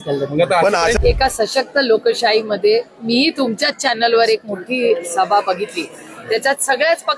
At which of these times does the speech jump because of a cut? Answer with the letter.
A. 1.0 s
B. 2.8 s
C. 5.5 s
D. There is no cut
A